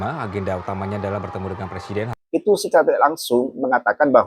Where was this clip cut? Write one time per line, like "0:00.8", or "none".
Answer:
0:02.1